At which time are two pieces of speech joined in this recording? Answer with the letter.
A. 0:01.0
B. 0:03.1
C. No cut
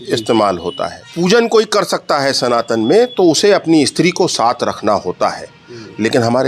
A